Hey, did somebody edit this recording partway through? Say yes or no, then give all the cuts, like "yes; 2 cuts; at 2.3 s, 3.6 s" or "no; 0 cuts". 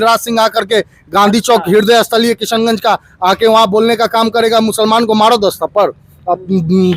no; 0 cuts